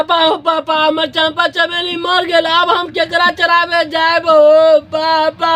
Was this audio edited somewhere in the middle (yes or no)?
no